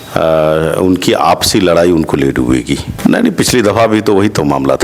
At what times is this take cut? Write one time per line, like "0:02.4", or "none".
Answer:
0:02.9